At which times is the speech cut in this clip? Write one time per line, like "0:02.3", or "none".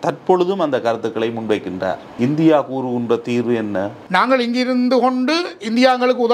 0:02.0
0:04.0